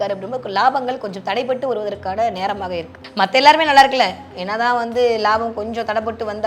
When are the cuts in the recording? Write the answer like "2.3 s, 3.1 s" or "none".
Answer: 3.0 s

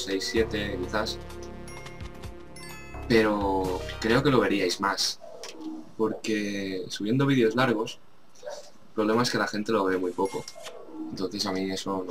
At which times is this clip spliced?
2.2 s

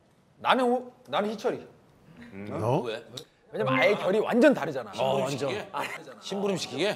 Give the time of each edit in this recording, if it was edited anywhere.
none

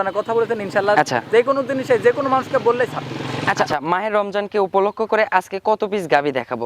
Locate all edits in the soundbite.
3.7 s

